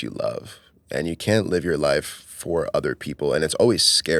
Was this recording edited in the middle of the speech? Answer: no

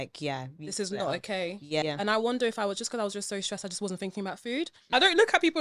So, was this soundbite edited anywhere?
yes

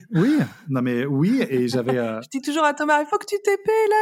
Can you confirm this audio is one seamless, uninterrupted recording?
no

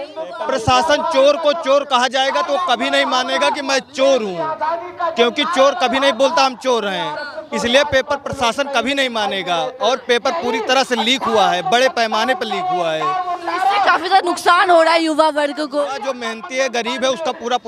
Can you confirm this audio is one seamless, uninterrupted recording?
yes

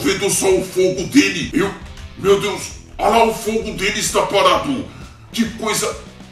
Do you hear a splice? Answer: yes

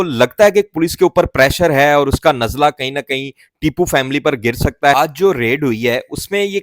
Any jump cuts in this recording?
yes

